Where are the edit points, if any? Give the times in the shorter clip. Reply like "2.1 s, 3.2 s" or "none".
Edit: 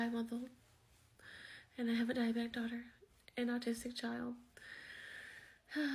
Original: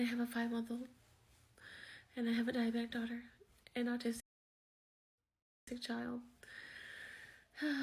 3.8 s